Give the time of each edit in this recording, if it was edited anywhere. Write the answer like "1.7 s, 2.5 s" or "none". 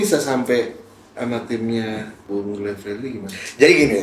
2.1 s